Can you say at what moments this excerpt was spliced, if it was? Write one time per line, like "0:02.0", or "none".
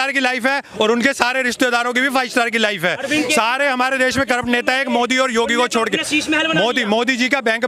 none